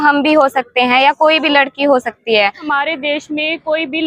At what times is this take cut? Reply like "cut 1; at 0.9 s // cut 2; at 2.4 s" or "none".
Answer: cut 1; at 2.7 s